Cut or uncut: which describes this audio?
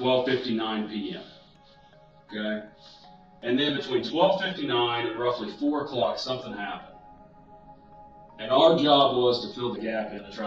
uncut